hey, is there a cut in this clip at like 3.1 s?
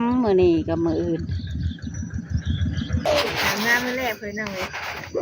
yes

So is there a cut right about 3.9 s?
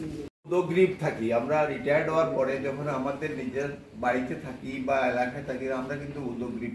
no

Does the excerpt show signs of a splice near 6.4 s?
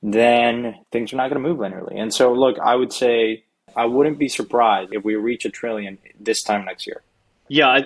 no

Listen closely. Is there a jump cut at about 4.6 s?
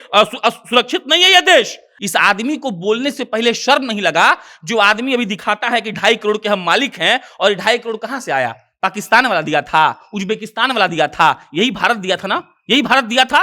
no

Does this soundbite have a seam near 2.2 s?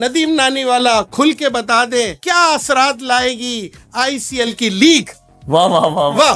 yes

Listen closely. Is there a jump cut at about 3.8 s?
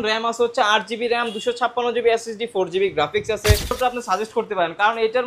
yes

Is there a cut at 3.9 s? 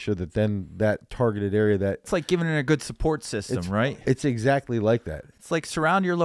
yes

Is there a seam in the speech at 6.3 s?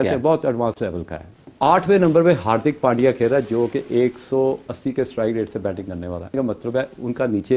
yes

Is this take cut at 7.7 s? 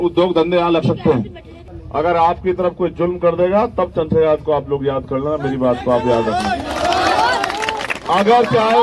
no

